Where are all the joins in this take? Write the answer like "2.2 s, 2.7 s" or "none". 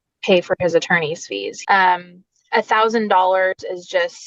1.4 s